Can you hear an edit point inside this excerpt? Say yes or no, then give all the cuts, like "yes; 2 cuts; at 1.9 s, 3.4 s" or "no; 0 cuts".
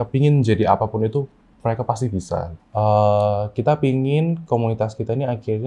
yes; 1 cut; at 2.6 s